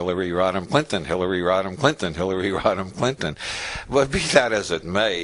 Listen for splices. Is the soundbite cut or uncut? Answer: uncut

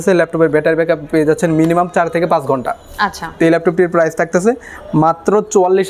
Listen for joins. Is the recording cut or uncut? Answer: uncut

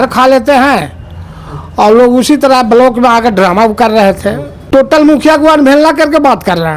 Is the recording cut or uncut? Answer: cut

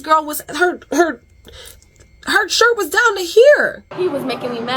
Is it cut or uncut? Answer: cut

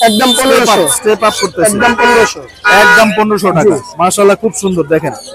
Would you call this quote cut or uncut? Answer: uncut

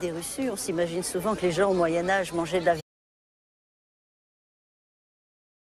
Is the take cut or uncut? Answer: uncut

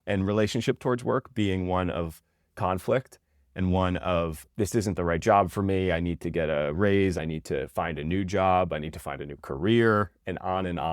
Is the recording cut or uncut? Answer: cut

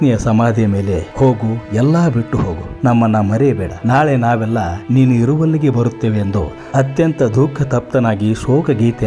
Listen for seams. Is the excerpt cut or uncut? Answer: uncut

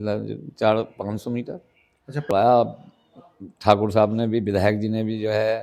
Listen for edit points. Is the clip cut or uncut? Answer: cut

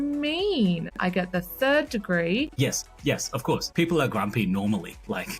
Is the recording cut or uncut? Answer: cut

